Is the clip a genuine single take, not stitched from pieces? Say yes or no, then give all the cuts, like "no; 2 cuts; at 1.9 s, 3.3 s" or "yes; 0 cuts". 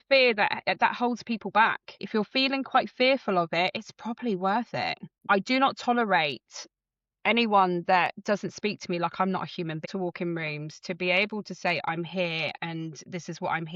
no; 3 cuts; at 2.1 s, 5.3 s, 9.9 s